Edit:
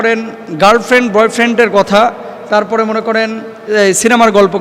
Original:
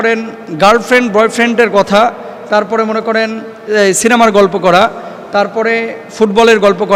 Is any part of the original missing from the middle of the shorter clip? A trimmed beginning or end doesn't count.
no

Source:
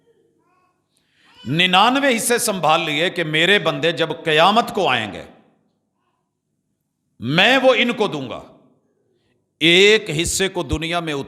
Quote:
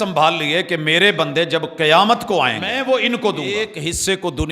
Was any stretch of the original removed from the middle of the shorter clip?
yes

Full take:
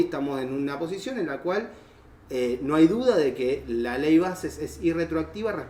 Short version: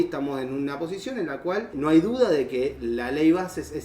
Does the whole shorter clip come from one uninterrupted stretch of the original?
no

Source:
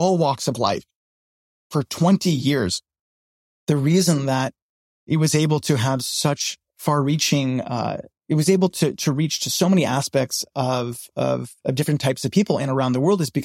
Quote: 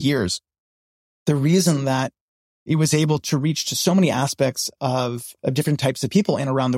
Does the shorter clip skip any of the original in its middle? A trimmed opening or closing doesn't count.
yes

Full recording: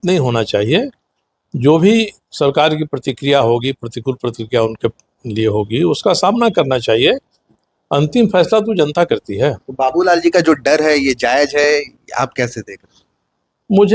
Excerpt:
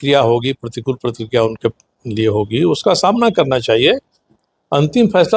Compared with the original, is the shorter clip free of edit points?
yes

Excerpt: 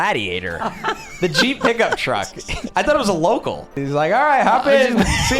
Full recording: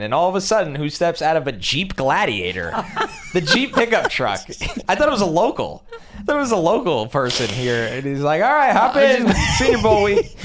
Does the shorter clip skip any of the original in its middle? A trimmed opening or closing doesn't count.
yes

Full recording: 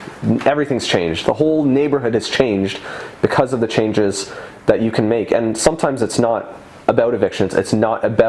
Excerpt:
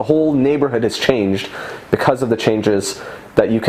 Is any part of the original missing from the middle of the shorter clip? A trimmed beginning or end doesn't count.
no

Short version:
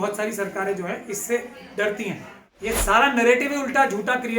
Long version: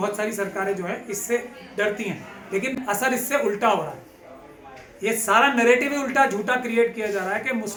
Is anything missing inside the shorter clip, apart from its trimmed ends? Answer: yes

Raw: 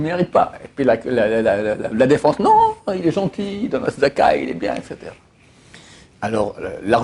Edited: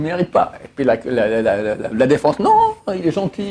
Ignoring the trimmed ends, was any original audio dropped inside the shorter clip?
no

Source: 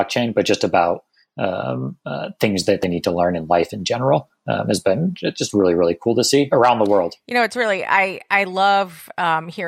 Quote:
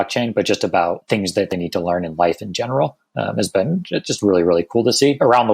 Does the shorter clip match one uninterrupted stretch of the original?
no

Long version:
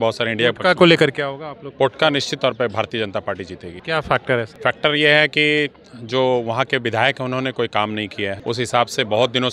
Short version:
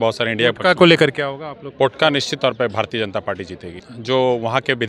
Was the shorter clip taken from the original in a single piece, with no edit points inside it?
no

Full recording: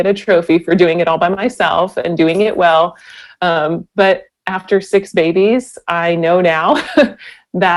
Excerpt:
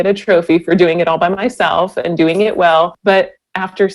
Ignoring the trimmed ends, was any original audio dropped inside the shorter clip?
yes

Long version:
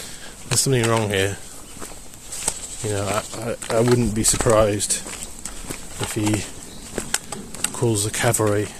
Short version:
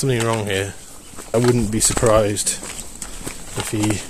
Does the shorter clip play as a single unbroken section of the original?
no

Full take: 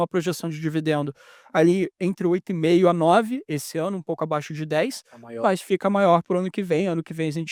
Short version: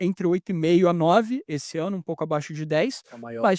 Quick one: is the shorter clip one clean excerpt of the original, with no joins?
yes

